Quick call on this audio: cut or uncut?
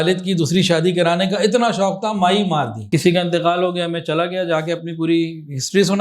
cut